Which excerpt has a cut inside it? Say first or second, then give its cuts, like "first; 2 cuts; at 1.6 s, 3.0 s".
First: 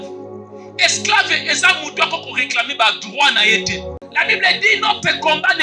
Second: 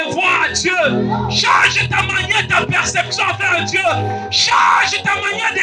first; 1 cut; at 3.9 s